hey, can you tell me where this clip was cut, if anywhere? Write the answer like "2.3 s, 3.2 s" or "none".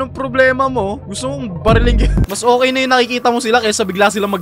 2.2 s